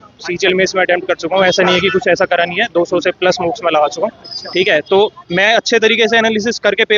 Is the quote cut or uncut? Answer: uncut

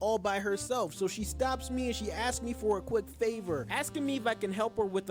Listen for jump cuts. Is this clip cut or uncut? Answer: uncut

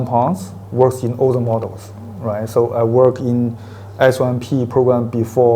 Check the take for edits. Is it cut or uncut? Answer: uncut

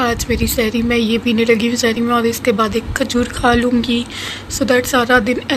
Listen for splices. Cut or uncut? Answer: uncut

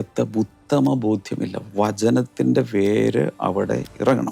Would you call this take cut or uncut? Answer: uncut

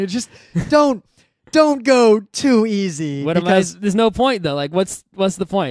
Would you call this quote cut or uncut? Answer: cut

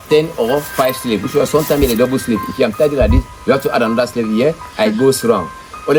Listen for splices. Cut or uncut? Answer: uncut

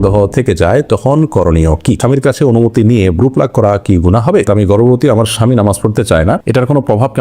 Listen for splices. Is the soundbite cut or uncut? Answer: cut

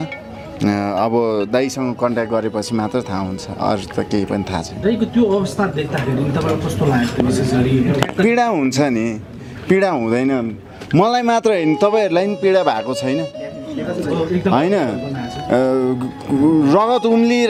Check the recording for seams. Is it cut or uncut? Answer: uncut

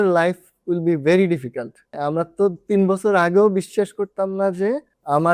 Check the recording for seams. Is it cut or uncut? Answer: cut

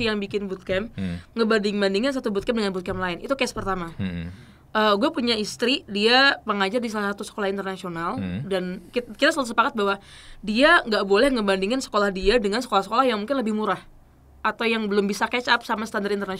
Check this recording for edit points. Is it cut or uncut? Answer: uncut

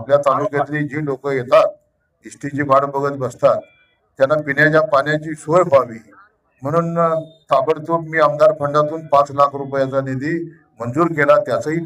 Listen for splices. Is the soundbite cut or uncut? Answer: uncut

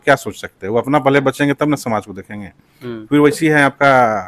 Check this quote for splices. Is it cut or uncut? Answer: uncut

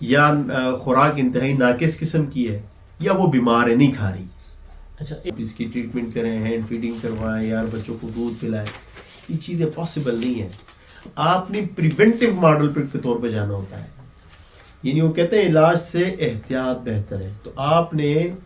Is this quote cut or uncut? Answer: cut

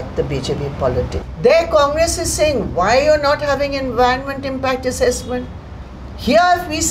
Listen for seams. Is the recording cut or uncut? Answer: cut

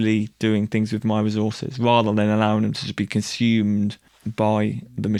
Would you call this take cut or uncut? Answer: uncut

